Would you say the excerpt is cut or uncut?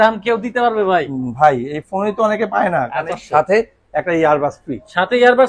cut